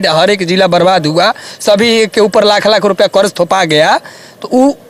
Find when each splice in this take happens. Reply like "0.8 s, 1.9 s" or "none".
none